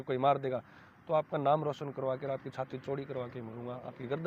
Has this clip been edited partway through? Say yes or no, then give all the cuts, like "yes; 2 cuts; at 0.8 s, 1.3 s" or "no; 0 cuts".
no; 0 cuts